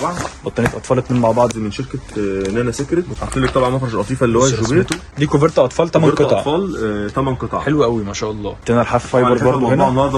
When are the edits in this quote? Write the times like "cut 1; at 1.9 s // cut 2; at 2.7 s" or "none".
cut 1; at 3.2 s // cut 2; at 5.1 s // cut 3; at 8.5 s